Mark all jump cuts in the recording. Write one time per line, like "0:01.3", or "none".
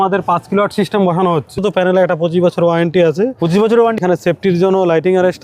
0:01.6
0:04.0